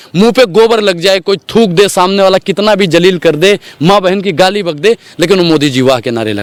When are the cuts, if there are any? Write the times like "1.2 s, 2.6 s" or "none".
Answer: none